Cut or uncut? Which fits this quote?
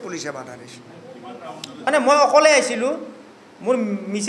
cut